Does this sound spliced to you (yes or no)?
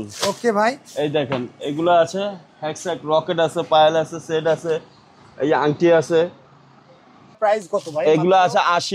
yes